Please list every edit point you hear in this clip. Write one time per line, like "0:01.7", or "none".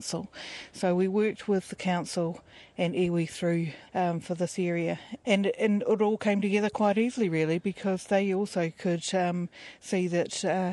0:03.8
0:05.1